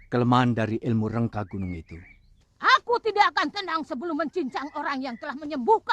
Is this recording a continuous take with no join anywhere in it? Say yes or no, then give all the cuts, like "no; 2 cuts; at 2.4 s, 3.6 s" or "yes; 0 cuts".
no; 1 cut; at 2.3 s